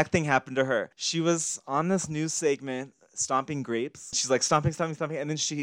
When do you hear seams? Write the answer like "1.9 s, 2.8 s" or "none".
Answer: 1.0 s, 4.2 s